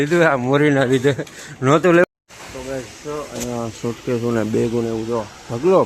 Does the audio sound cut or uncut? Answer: cut